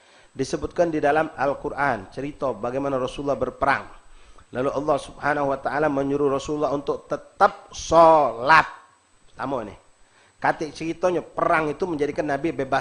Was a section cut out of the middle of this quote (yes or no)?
no